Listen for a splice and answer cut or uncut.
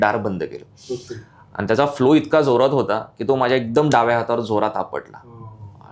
uncut